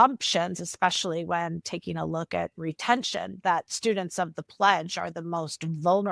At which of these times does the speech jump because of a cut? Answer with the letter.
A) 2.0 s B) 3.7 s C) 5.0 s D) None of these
B